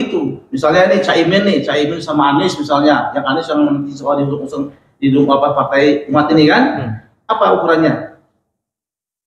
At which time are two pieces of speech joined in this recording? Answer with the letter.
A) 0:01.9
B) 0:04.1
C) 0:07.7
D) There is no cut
D